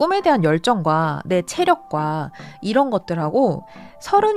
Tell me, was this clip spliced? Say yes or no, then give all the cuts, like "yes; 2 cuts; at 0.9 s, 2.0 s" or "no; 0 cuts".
no; 0 cuts